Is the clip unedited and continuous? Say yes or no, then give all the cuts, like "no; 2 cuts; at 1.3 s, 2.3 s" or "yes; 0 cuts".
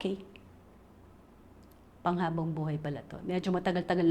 yes; 0 cuts